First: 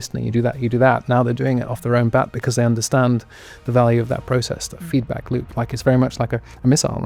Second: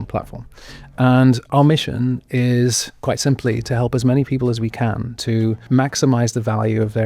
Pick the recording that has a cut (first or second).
second